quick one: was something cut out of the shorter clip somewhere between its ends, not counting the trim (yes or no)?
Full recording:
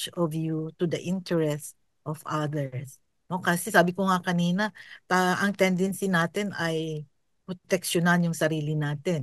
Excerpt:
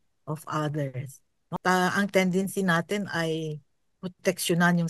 yes